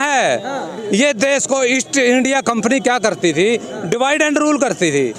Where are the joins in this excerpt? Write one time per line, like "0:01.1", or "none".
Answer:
none